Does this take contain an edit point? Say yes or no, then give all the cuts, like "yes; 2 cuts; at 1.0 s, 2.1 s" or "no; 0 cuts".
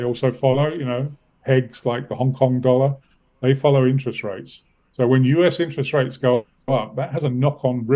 no; 0 cuts